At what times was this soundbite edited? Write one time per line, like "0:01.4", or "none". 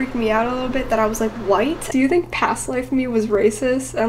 0:01.8